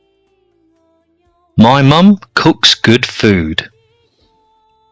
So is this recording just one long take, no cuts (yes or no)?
no